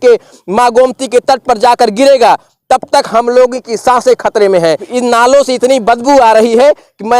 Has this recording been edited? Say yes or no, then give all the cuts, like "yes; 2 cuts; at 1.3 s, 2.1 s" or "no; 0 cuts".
yes; 1 cut; at 4.9 s